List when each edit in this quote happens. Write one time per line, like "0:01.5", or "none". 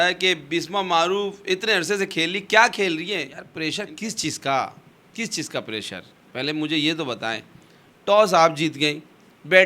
0:03.4

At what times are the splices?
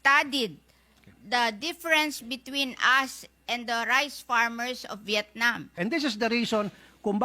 0:05.7

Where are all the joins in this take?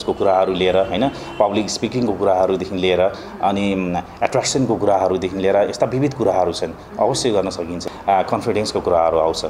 0:07.8

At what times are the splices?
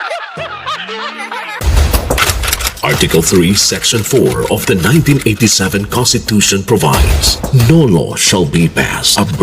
0:01.5

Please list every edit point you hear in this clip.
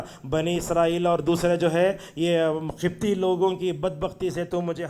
none

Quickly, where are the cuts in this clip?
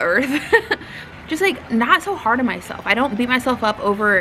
0:01.1

